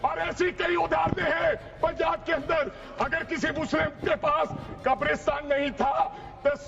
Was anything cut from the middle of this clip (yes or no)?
no